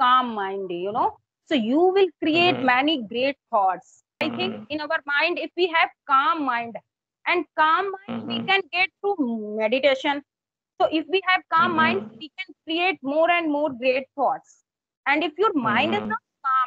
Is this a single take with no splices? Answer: no; 1 cut; at 4.2 s

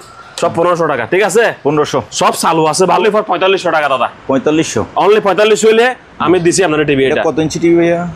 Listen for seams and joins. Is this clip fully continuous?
no; 1 cut; at 3.0 s

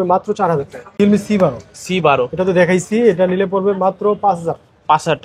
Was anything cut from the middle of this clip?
yes; 1 cut; at 1.0 s

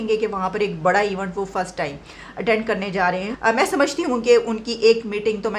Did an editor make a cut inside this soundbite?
yes; 1 cut; at 3.3 s

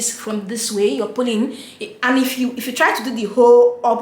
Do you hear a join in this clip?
no; 0 cuts

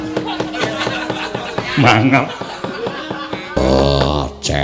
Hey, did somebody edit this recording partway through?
yes; 1 cut; at 3.5 s

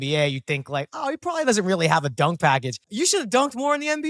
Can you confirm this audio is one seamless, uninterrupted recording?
no; 1 cut; at 2.8 s

